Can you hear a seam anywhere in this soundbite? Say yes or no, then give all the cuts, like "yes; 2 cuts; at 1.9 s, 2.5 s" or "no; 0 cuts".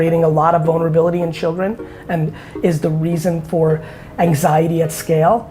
no; 0 cuts